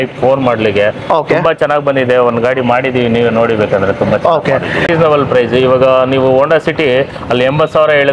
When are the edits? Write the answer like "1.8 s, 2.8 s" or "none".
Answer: 4.9 s